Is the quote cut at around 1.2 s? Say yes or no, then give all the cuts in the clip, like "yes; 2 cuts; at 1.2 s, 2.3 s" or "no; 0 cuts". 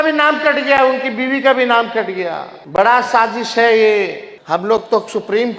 no; 2 cuts; at 2.6 s, 4.3 s